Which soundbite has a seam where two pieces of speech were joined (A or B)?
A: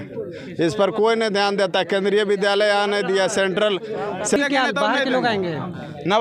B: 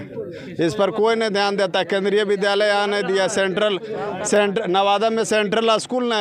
A